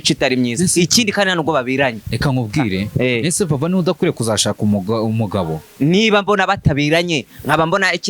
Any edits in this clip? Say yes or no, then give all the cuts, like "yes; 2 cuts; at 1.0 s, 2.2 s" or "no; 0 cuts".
yes; 1 cut; at 5.6 s